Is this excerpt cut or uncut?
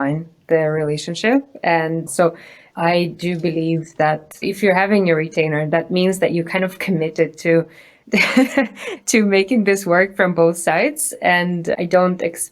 cut